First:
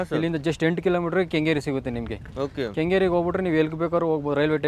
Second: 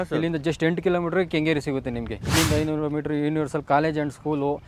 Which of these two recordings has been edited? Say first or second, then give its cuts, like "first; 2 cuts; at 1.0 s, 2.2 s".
second; 1 cut; at 2.3 s